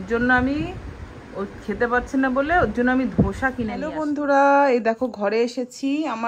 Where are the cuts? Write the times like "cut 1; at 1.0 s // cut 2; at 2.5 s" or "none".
cut 1; at 3.8 s